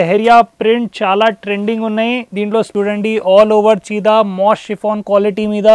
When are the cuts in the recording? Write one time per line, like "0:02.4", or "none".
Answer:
0:02.7